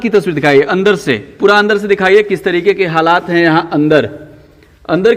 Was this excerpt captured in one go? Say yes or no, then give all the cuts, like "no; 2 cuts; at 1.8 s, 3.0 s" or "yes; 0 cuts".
yes; 0 cuts